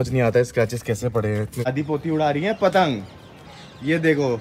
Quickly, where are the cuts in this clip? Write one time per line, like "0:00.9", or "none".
0:01.7